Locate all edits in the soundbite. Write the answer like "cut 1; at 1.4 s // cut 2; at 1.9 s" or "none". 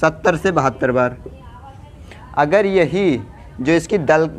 none

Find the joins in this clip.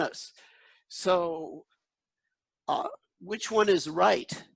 none

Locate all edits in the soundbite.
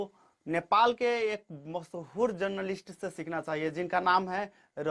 none

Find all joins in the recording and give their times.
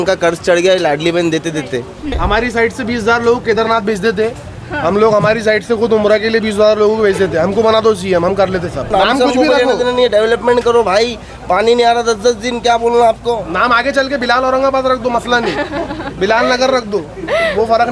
cut 1; at 2.2 s // cut 2; at 8.9 s

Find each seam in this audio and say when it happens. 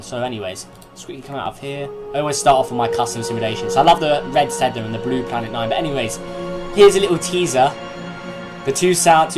cut 1; at 5.3 s

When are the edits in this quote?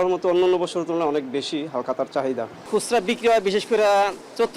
cut 1; at 2.6 s

